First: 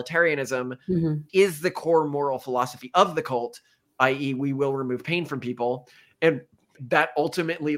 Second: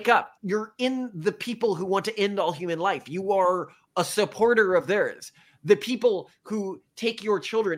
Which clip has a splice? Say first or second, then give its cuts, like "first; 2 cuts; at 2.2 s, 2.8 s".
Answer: first; 2 cuts; at 1.2 s, 6.7 s